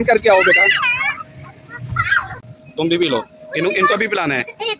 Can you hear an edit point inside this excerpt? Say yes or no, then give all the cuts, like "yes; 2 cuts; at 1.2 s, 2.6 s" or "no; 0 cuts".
yes; 1 cut; at 2.3 s